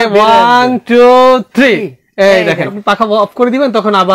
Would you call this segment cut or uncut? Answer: cut